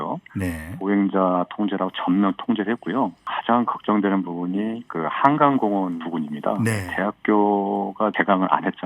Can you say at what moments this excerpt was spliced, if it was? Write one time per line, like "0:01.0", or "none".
0:03.3
0:06.0
0:06.9
0:08.1